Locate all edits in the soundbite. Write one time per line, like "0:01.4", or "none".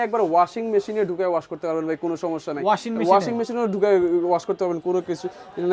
none